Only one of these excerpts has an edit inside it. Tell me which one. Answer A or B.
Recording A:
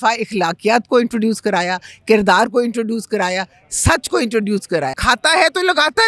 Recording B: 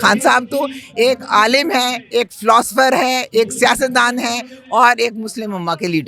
A